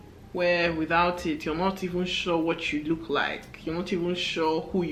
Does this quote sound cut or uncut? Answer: uncut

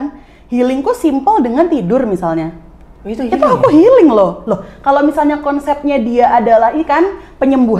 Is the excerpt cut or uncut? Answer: uncut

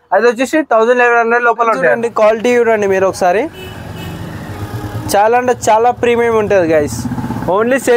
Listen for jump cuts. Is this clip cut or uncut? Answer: cut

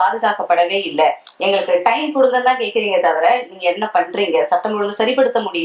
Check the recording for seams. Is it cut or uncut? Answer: uncut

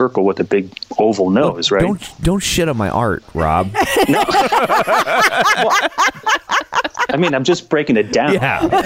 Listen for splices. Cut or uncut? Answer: uncut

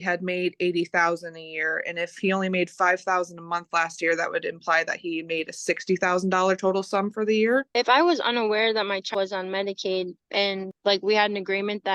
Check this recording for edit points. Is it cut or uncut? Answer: cut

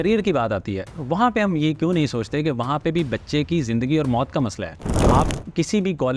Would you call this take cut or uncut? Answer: cut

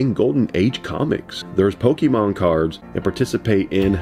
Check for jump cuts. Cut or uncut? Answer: cut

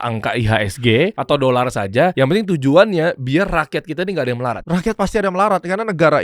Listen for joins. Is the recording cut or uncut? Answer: cut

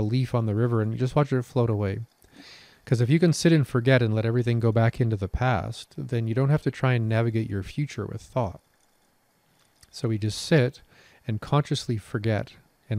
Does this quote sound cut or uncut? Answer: uncut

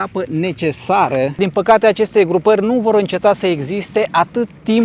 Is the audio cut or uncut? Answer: cut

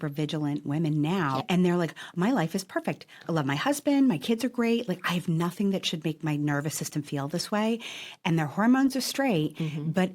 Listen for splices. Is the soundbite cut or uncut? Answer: cut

